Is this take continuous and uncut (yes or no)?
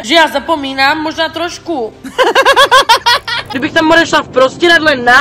no